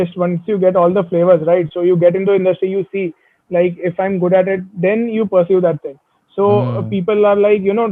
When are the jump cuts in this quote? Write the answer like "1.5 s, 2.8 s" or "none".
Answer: none